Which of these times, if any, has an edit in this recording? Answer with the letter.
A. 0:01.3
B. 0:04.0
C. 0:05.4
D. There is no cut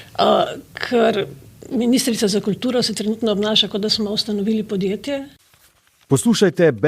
C